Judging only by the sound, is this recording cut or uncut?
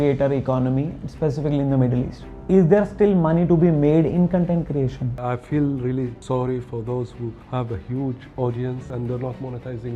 cut